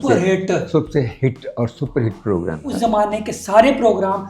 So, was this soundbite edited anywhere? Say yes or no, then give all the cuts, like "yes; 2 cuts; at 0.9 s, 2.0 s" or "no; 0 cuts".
yes; 1 cut; at 2.7 s